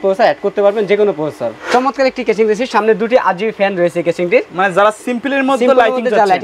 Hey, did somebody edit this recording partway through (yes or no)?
yes